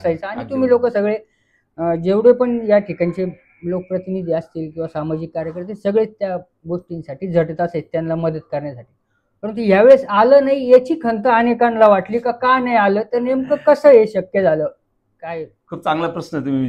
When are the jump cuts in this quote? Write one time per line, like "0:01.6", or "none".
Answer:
none